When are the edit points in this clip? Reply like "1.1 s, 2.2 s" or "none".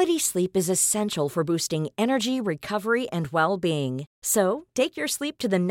none